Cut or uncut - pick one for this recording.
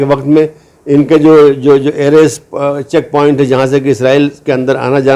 uncut